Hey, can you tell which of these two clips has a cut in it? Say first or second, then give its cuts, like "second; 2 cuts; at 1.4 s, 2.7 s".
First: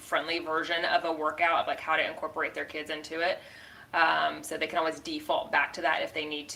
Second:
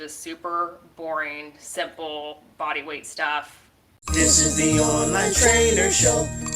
second; 1 cut; at 4.0 s